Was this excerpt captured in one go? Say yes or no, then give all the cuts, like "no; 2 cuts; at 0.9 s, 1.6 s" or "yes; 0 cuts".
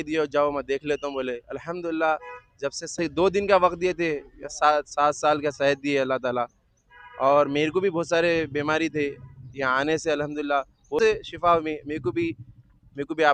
yes; 0 cuts